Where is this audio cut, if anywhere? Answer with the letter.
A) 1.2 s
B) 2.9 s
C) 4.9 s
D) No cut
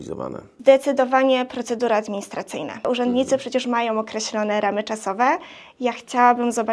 B